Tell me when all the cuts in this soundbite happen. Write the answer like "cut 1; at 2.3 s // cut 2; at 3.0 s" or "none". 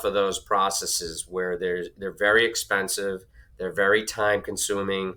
none